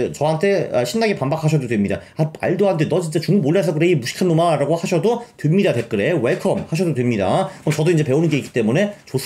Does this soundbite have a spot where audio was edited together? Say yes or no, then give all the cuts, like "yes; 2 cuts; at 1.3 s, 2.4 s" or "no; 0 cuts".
no; 0 cuts